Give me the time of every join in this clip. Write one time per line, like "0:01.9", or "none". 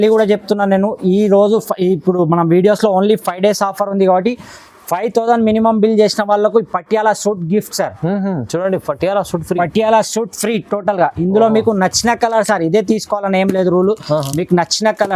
none